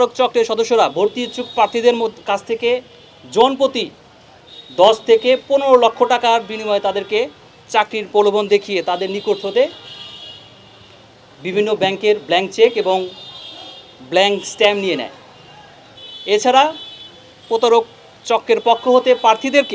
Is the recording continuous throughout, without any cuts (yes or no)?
yes